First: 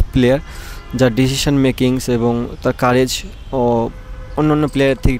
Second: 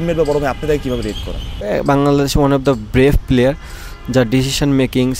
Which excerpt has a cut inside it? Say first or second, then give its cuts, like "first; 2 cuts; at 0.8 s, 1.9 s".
second; 1 cut; at 1.5 s